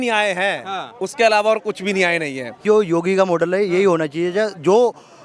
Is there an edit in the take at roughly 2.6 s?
yes; 1 cut; at 2.6 s

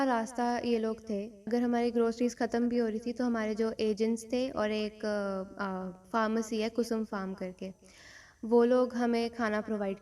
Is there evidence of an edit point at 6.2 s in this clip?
no; 1 cut; at 1.5 s

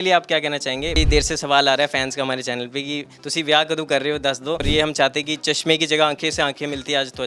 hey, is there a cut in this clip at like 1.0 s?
yes; 2 cuts; at 1.0 s, 4.7 s

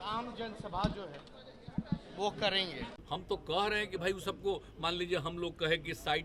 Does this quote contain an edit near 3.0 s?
yes; 1 cut; at 3.0 s

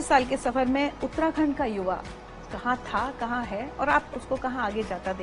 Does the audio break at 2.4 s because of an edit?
no; 0 cuts

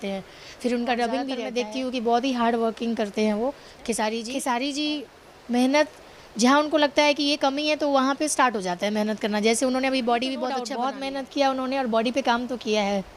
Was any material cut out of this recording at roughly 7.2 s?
no; 3 cuts; at 1.4 s, 4.2 s, 10.7 s

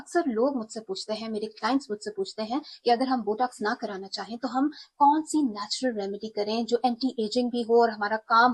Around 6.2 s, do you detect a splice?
no; 0 cuts

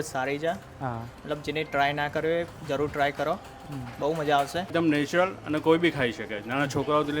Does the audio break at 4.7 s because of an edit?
yes; 1 cut; at 4.7 s

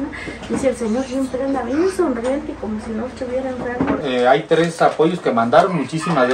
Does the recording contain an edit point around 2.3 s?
no; 1 cut; at 4.0 s

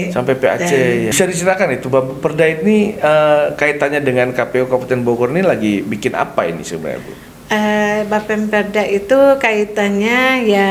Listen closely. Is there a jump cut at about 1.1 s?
yes; 1 cut; at 1.1 s

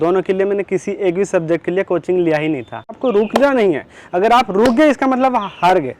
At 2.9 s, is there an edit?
yes; 1 cut; at 2.9 s

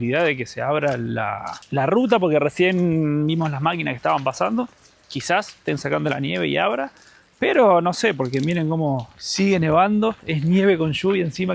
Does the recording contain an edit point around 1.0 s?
no; 0 cuts

